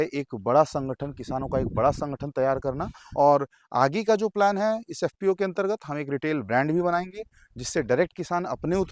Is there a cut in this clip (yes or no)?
yes